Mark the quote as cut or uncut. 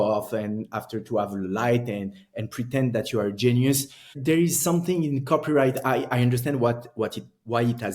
cut